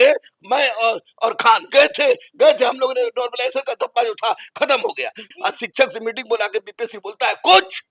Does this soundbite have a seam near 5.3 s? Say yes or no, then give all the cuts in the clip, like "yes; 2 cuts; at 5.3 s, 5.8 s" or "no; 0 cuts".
yes; 1 cut; at 5.3 s